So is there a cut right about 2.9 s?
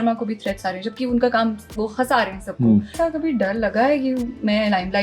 yes; 1 cut; at 2.9 s

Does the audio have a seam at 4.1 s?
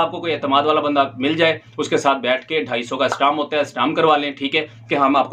no; 0 cuts

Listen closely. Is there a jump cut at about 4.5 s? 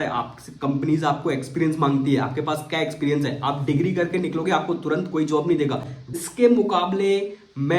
no; 1 cut; at 6.0 s

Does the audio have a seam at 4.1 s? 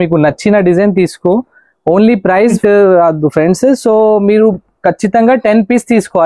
no; 1 cut; at 2.6 s

